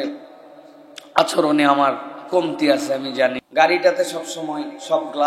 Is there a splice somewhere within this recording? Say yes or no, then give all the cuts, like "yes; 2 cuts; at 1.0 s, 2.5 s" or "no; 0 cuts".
yes; 1 cut; at 3.4 s